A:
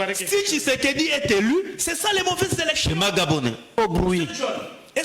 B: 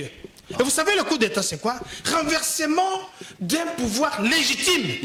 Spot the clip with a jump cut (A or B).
A